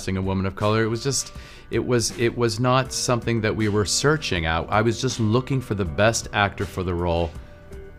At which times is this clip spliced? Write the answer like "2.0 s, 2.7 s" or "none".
none